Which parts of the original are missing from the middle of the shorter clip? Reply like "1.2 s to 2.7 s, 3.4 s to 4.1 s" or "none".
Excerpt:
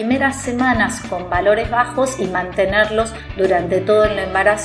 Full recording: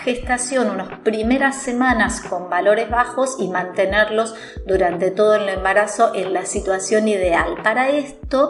4.4 s to 4.5 s